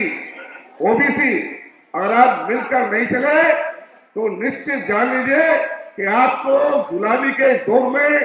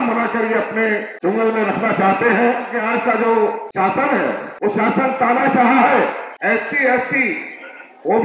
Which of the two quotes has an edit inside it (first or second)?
second